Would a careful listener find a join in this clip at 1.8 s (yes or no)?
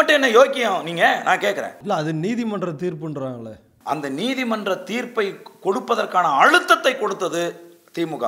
yes